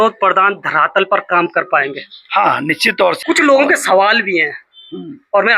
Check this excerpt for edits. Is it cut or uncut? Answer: cut